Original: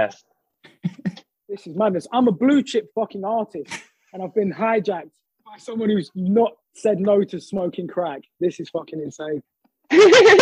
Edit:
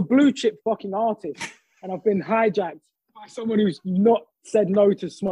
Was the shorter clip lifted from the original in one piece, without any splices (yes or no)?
yes